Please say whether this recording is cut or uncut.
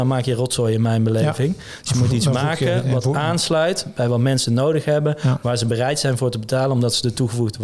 uncut